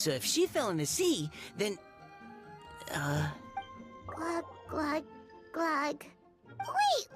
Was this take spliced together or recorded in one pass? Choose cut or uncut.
uncut